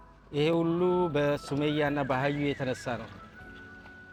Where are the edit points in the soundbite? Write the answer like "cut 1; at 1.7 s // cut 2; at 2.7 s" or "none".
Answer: none